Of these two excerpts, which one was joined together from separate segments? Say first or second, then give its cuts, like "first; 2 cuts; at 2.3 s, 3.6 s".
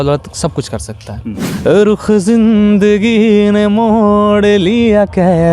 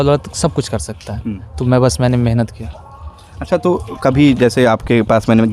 first; 1 cut; at 1.4 s